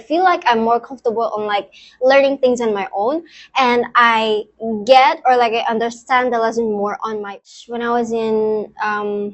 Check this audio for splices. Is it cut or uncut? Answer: cut